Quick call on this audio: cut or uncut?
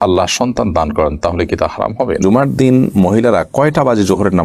cut